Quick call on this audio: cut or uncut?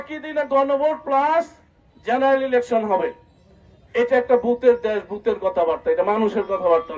uncut